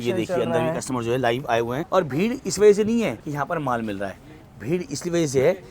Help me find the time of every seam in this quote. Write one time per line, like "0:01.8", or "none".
0:01.8
0:03.2

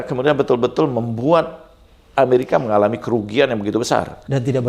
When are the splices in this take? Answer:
none

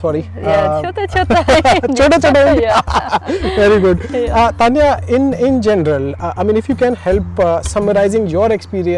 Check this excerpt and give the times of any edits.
none

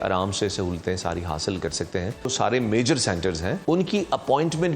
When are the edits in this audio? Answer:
0:02.3
0:03.6

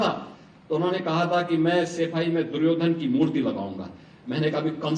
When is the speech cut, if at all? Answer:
none

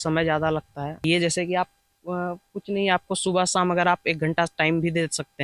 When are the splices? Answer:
0:01.0

